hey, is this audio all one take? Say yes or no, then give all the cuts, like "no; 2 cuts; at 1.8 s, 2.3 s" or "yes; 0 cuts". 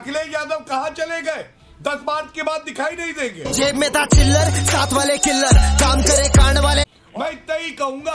no; 1 cut; at 6.9 s